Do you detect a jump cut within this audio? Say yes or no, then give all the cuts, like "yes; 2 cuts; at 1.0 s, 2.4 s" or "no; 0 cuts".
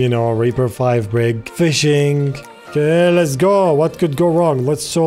yes; 2 cuts; at 1.5 s, 2.6 s